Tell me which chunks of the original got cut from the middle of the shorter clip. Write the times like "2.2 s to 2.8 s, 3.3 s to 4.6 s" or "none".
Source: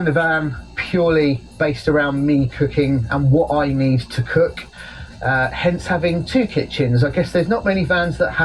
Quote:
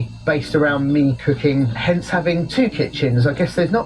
3.1 s to 5.5 s